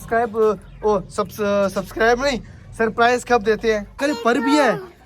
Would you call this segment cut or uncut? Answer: cut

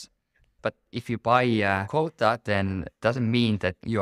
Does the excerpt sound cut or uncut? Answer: cut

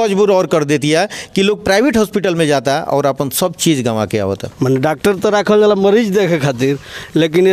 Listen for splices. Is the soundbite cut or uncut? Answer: cut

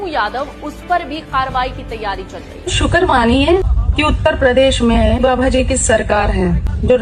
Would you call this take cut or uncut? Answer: cut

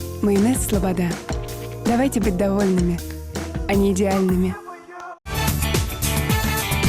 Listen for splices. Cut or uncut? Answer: cut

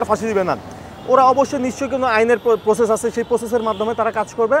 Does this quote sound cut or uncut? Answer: uncut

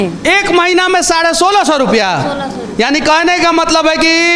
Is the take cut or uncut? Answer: uncut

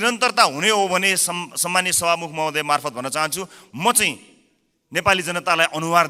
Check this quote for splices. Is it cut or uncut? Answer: uncut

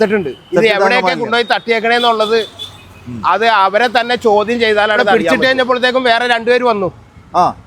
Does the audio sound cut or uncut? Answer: cut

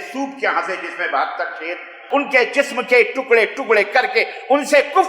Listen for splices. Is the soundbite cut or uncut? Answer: cut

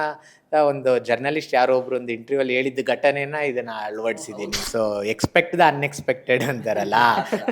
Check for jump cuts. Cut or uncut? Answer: cut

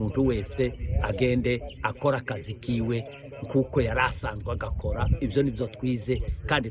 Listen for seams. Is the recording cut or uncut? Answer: cut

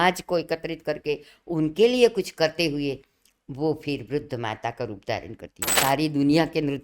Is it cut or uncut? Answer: cut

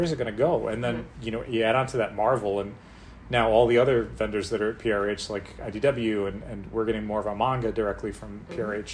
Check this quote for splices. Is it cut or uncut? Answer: uncut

